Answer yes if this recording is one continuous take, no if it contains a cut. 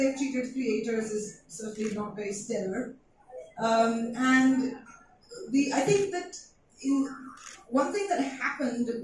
yes